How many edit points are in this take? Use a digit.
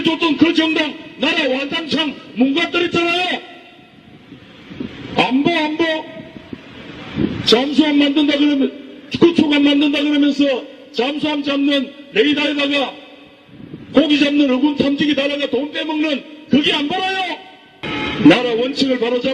1